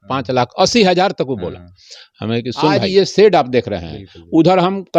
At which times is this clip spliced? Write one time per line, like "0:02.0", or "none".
0:02.8